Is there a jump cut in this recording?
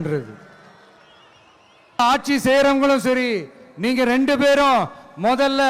yes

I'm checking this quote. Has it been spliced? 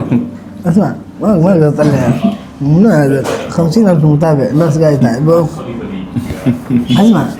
no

